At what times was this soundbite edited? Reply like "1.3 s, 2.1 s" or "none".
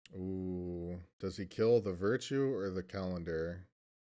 1.1 s